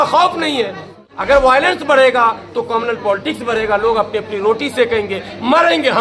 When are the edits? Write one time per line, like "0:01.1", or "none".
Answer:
0:00.9